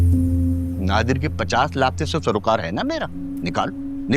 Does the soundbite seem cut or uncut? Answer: cut